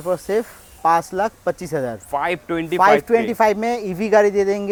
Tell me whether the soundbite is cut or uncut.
uncut